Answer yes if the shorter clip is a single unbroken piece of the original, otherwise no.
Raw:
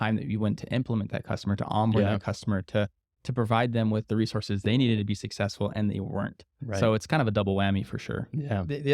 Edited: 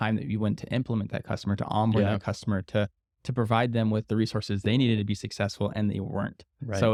yes